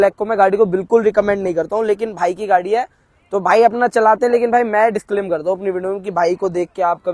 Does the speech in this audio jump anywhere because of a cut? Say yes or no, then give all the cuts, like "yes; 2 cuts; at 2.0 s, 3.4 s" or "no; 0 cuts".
no; 0 cuts